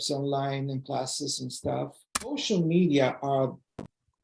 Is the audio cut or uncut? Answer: cut